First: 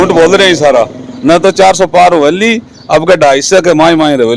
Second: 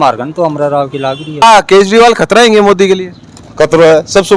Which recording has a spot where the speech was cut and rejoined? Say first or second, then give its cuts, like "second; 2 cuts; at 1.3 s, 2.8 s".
second; 1 cut; at 1.2 s